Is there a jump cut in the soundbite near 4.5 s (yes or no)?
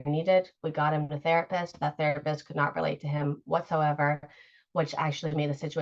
no